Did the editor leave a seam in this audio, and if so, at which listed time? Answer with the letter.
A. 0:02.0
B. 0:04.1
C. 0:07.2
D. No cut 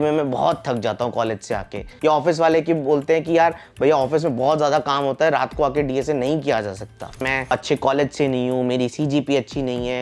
C